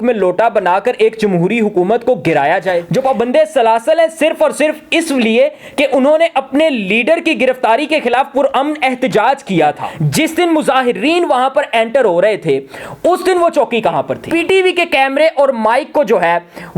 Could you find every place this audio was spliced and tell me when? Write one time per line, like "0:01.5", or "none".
0:02.8
0:09.9
0:14.2